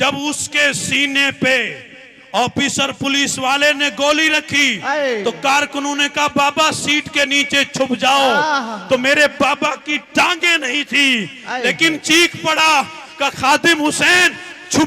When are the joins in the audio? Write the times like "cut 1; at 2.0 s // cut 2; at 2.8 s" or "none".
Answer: none